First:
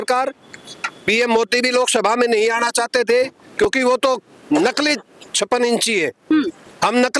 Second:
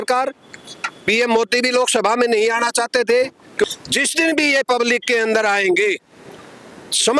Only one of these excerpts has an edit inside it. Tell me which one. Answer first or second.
second